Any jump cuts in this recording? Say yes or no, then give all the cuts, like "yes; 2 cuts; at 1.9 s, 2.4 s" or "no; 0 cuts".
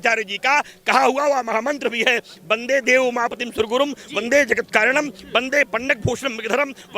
no; 0 cuts